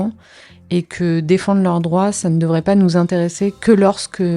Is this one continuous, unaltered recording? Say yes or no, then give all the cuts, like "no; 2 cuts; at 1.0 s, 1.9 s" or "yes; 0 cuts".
yes; 0 cuts